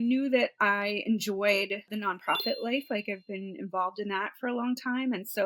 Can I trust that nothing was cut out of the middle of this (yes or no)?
yes